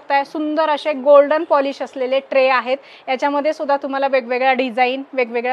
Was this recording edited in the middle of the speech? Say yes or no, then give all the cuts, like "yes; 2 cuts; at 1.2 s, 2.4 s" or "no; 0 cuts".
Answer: no; 0 cuts